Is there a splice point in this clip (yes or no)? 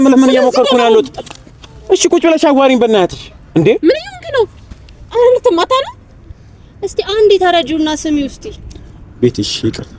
no